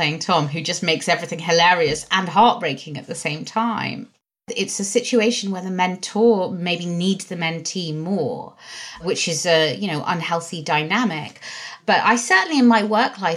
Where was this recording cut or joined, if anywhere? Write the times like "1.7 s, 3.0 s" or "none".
4.4 s, 9.0 s, 11.8 s